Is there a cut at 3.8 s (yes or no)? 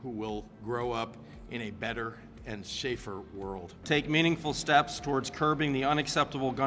yes